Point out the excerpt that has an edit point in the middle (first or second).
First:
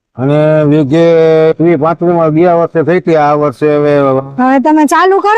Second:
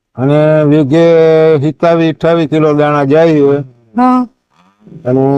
first